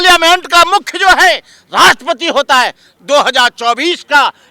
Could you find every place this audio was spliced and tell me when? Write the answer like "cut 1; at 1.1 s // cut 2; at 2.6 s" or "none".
cut 1; at 2.9 s

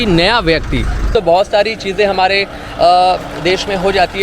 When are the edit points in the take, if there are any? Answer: cut 1; at 1.1 s

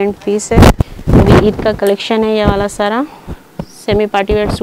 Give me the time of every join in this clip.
cut 1; at 0.9 s

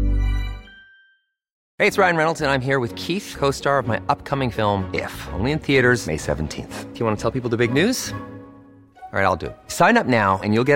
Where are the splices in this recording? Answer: cut 1; at 1.7 s

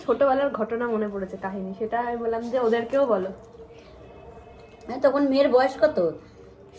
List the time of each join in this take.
none

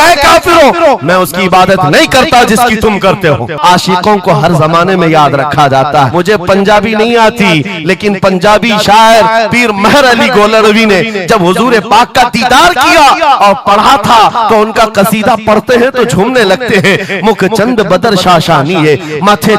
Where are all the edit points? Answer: cut 1; at 3.6 s // cut 2; at 6.1 s

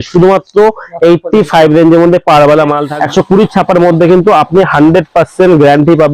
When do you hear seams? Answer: cut 1; at 2.8 s

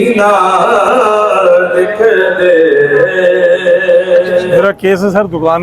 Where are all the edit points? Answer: cut 1; at 4.6 s

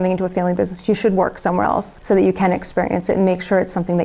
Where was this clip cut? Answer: cut 1; at 1.9 s

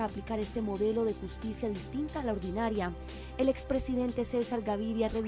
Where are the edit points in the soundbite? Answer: cut 1; at 4.0 s

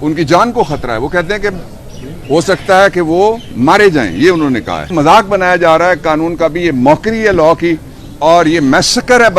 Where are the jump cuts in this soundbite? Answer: cut 1; at 4.9 s

